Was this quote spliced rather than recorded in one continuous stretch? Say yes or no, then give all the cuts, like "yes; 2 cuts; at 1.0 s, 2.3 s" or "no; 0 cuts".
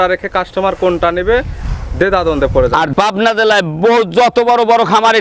yes; 1 cut; at 2.9 s